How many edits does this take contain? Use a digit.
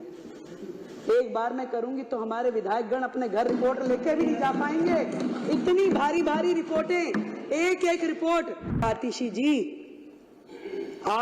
1